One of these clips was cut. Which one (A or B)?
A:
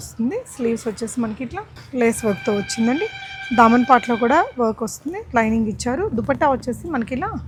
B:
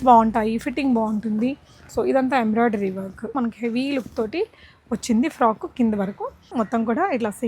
B